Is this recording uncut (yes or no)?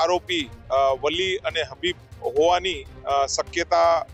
yes